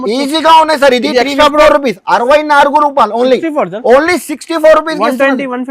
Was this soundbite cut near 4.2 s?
no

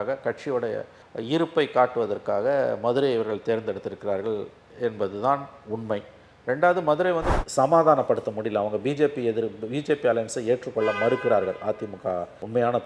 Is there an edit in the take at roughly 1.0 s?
no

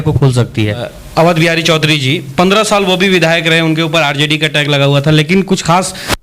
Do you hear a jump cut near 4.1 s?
no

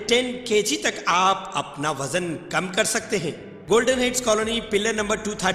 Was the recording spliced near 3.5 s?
yes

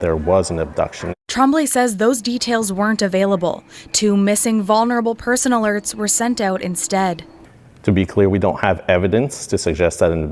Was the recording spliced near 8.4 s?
no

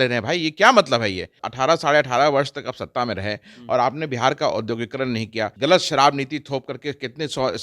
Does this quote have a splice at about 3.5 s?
no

